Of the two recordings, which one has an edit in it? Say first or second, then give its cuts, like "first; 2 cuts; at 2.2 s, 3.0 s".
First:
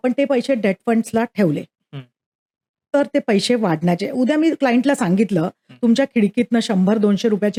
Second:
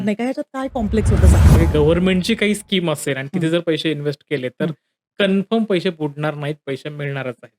second; 1 cut; at 1.5 s